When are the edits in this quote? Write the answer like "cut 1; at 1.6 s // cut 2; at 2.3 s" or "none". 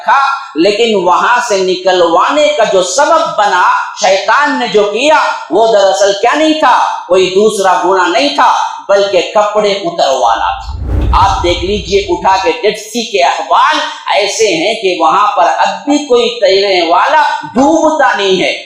cut 1; at 11.0 s